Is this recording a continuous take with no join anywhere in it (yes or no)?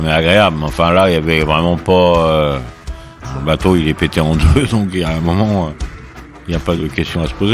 no